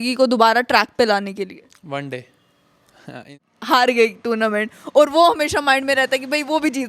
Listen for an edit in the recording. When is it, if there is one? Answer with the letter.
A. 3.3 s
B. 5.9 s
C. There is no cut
A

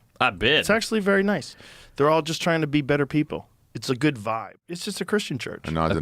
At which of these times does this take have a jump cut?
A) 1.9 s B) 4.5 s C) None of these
B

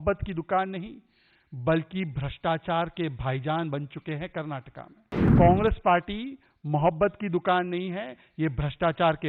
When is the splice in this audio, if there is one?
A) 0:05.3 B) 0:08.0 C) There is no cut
A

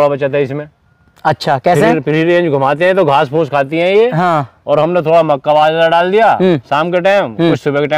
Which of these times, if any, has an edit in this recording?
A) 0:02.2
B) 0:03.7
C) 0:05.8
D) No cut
D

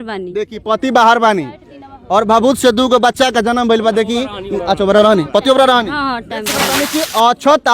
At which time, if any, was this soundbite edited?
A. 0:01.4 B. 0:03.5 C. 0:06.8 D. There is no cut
C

